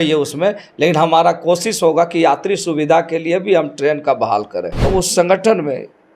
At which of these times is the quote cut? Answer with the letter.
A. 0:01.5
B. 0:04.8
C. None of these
B